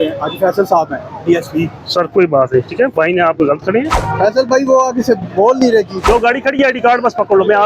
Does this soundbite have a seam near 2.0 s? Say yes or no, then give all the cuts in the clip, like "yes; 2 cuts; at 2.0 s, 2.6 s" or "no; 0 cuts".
no; 2 cuts; at 4.0 s, 6.0 s